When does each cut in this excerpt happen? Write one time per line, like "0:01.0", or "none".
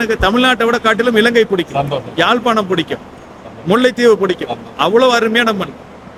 none